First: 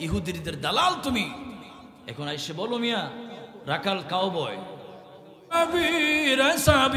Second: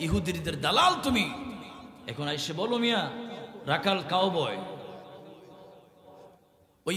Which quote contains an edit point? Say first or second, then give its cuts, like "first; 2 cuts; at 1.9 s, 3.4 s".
first; 1 cut; at 5.5 s